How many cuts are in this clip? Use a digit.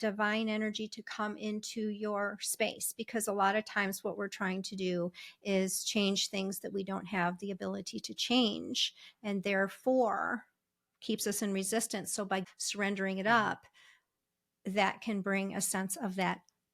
1